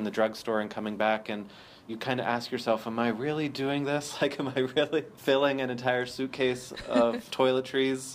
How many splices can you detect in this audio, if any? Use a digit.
3